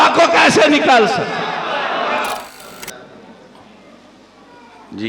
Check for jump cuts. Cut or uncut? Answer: cut